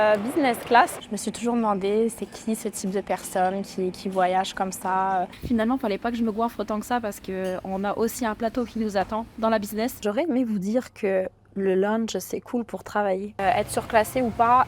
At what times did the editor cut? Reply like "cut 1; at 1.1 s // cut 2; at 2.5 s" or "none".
cut 1; at 1.0 s // cut 2; at 5.3 s // cut 3; at 10.0 s // cut 4; at 13.4 s

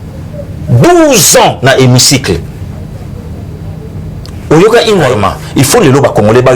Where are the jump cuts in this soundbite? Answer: cut 1; at 5.1 s

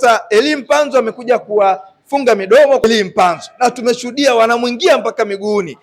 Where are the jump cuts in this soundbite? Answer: cut 1; at 2.8 s

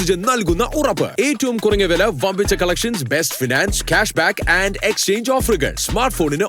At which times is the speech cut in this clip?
none

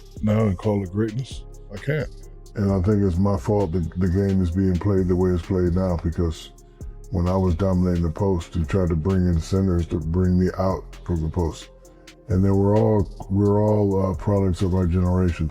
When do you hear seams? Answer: cut 1; at 2.2 s

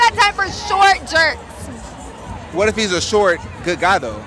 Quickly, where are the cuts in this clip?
none

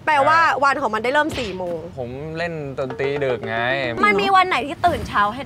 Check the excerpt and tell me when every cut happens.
cut 1; at 1.9 s // cut 2; at 3.9 s

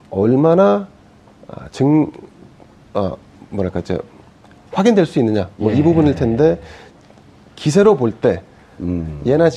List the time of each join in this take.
cut 1; at 8.5 s

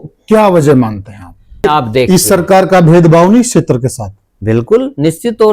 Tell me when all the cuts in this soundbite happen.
cut 1; at 1.6 s

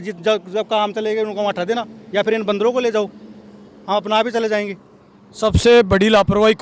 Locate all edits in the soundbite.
none

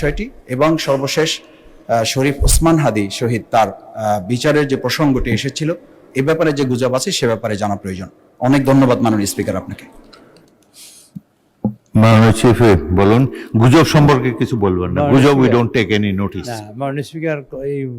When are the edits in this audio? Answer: none

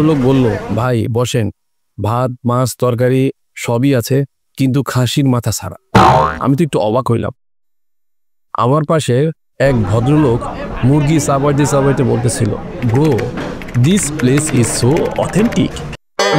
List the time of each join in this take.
none

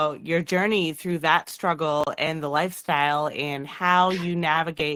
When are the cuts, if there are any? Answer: none

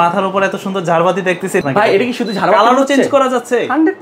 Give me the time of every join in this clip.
cut 1; at 1.6 s

